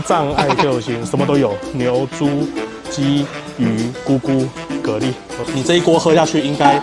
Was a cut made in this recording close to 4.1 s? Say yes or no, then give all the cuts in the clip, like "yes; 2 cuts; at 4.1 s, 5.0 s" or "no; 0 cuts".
no; 1 cut; at 5.4 s